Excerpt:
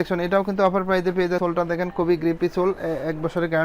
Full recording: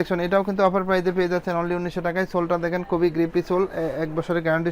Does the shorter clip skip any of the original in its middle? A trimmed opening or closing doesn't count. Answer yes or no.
yes